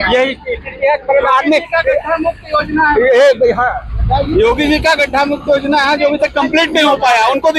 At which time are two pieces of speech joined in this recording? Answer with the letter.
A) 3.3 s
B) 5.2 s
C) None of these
C